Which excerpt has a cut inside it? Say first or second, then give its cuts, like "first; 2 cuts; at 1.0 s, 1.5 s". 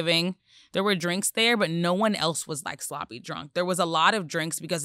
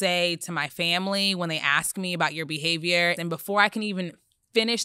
second; 1 cut; at 3.2 s